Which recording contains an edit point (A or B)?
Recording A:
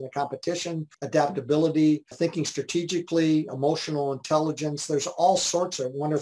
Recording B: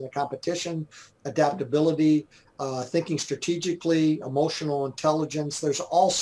A